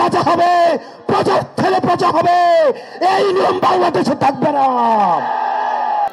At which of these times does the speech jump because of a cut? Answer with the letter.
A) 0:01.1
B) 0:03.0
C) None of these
C